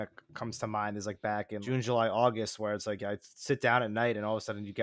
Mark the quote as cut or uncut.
cut